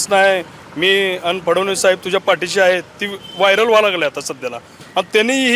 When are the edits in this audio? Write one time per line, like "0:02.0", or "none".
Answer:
none